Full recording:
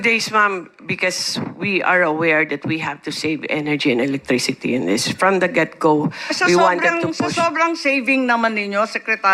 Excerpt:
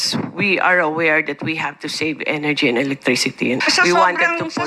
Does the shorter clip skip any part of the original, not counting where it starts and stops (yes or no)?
yes